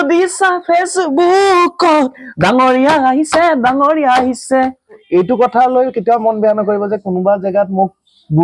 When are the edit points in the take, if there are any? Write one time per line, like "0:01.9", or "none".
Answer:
0:05.0